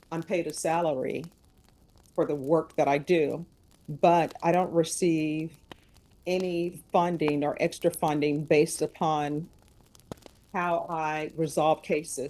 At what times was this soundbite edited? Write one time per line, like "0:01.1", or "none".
none